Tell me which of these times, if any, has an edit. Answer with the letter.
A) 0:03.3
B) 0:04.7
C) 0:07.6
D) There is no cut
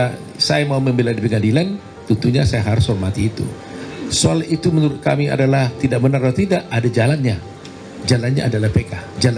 D